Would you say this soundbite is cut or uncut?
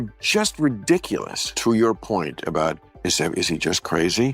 cut